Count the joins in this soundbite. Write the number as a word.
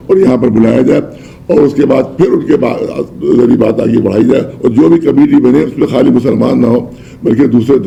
zero